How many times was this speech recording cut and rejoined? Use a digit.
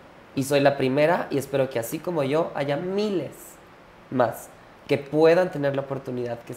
0